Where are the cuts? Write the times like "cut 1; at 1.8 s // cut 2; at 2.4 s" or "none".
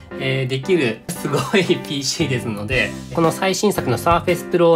cut 1; at 3.1 s

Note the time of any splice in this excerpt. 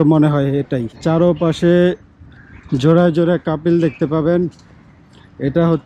cut 1; at 1.0 s

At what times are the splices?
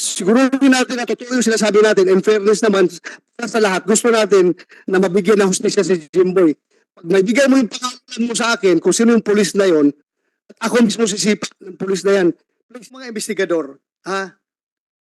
cut 1; at 13.1 s

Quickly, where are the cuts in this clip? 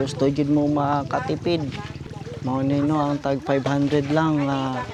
none

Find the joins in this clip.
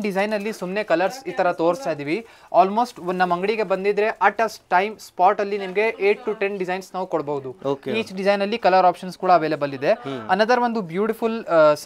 none

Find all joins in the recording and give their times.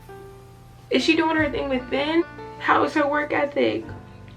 cut 1; at 2.2 s

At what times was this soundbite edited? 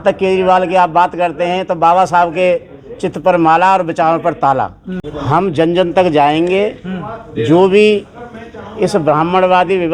none

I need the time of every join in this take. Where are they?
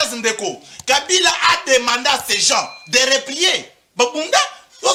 none

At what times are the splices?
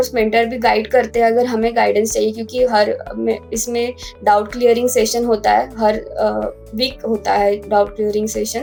none

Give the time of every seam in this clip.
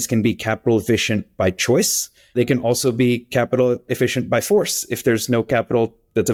none

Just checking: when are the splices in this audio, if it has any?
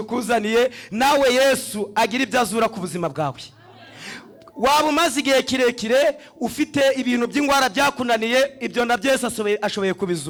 none

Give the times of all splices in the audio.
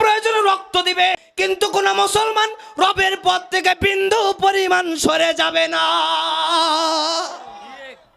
cut 1; at 1.2 s

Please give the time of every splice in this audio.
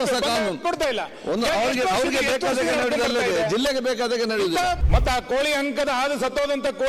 cut 1; at 4.8 s

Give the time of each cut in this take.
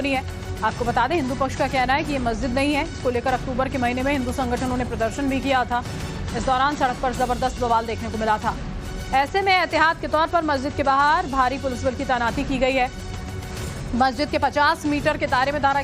cut 1; at 1.5 s

